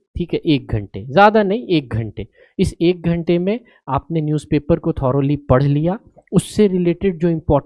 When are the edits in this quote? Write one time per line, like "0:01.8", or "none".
none